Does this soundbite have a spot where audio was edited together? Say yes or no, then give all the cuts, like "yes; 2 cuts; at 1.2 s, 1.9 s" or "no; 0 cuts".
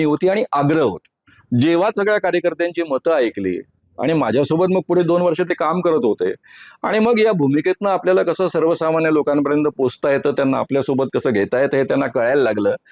no; 0 cuts